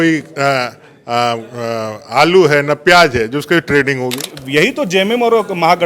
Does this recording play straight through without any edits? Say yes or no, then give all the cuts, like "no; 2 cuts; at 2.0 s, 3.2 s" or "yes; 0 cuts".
no; 1 cut; at 4.4 s